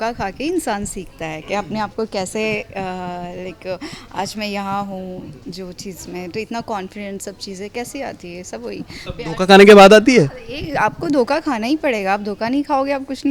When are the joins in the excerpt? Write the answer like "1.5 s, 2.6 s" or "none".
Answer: none